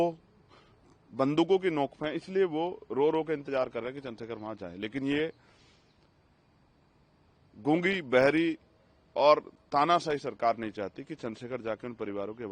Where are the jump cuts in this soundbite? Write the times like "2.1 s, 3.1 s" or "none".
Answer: none